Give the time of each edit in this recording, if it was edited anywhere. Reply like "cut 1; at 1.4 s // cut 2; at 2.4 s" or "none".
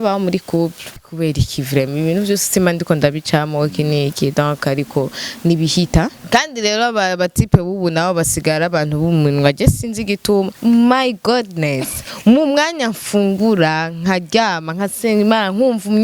cut 1; at 1.1 s // cut 2; at 6.2 s // cut 3; at 10.5 s